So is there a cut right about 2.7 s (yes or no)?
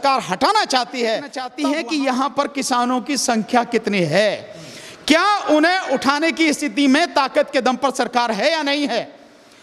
no